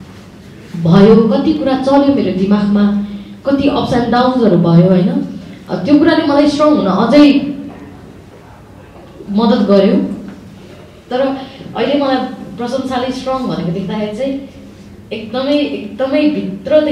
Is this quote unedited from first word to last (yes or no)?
yes